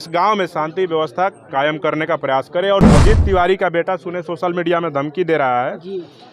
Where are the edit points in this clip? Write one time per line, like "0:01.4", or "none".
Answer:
0:02.8